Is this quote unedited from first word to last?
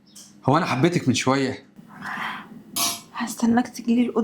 no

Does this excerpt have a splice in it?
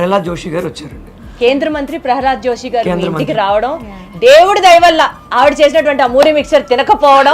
no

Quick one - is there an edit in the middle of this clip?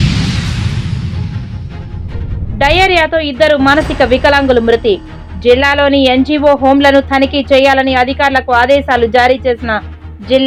no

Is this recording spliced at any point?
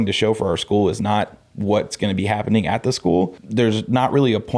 yes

